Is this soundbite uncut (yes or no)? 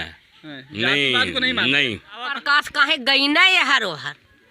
no